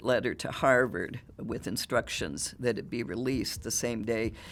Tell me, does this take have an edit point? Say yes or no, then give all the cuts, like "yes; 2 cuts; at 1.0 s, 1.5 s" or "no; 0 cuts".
no; 0 cuts